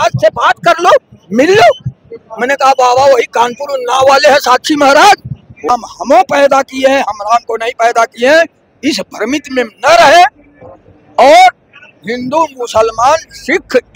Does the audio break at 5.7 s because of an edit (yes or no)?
yes